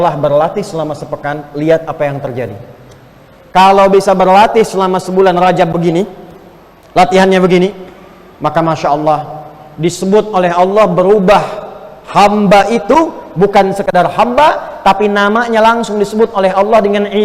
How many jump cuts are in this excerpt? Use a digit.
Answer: 1